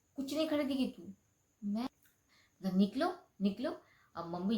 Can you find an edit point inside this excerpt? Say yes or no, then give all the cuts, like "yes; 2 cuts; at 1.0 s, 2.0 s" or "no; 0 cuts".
yes; 1 cut; at 1.9 s